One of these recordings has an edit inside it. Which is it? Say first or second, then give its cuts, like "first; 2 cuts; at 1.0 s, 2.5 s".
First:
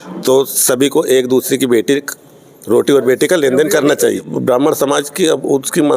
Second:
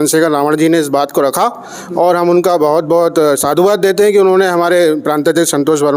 first; 1 cut; at 4.3 s